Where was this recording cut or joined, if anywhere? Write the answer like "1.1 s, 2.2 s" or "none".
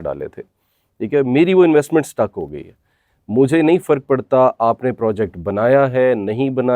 none

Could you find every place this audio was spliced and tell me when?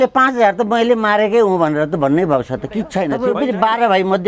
3.1 s

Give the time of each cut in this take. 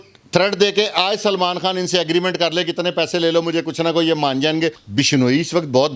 4.8 s

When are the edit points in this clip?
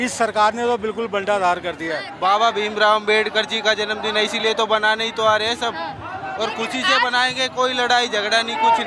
2.1 s

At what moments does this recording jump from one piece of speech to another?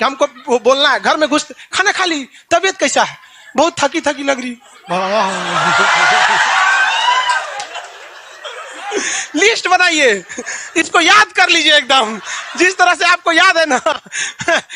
none

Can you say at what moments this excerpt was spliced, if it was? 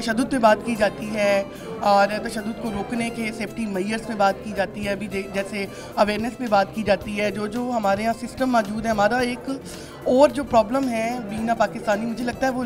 none

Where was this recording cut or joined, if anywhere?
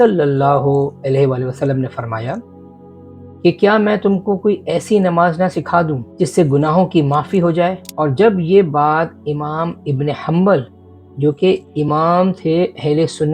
6.0 s, 7.8 s

